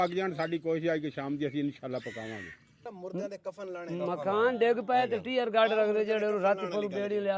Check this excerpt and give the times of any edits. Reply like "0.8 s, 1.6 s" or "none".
2.9 s